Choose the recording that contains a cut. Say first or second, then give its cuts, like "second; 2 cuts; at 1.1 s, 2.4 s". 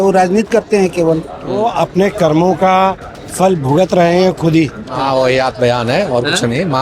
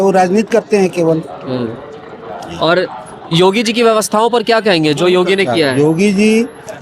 first; 2 cuts; at 1.6 s, 4.9 s